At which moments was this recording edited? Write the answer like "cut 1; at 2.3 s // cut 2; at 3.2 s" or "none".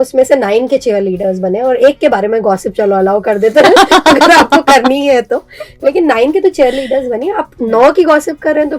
none

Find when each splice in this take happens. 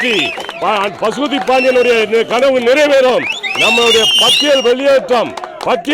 none

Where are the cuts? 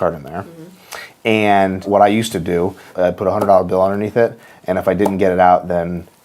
cut 1; at 1.9 s // cut 2; at 2.9 s

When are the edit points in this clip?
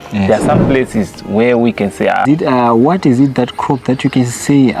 cut 1; at 2.2 s

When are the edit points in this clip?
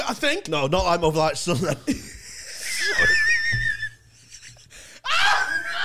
none

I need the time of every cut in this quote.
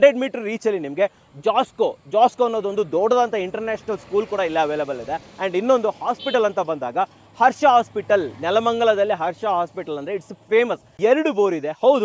cut 1; at 10.9 s

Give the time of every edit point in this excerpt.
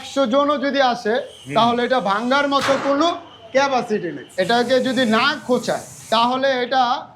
cut 1; at 4.6 s // cut 2; at 6.0 s

